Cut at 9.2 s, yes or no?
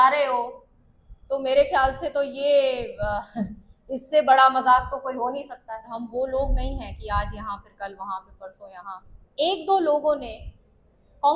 yes